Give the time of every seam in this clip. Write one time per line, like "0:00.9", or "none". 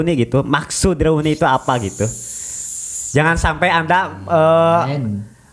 none